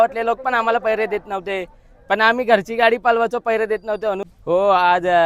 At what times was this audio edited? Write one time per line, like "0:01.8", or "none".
0:04.3